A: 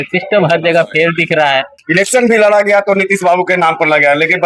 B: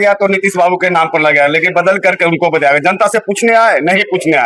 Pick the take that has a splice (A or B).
A